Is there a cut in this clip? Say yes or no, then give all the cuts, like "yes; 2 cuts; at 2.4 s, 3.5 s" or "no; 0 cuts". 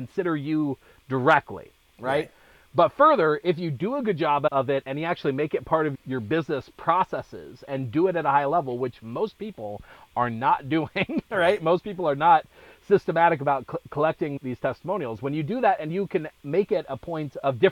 no; 0 cuts